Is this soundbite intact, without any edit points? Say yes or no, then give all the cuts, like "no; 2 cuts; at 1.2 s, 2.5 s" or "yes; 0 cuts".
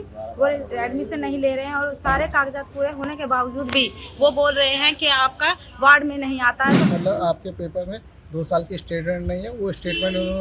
no; 1 cut; at 6.9 s